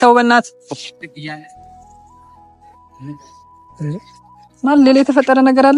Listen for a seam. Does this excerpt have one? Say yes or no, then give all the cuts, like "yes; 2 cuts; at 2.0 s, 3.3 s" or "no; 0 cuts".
no; 0 cuts